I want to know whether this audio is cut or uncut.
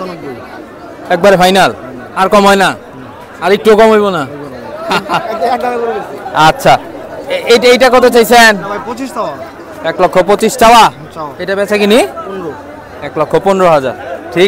uncut